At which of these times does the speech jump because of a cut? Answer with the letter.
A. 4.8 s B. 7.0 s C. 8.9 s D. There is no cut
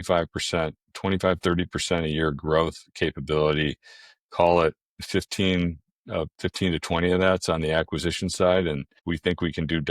C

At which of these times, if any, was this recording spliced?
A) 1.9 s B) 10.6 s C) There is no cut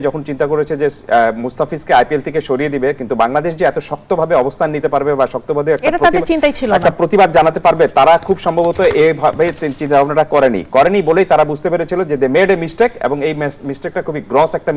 C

